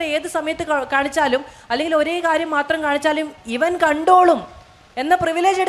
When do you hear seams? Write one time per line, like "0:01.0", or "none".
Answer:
none